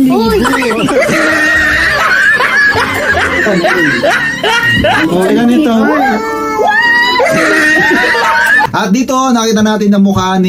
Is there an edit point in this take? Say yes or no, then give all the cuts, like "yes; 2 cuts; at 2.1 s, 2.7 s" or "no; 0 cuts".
no; 0 cuts